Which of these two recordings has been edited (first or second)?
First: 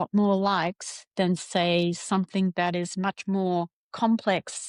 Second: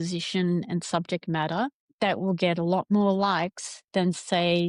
second